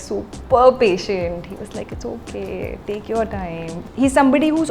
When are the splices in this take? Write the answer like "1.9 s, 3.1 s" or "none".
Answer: 3.8 s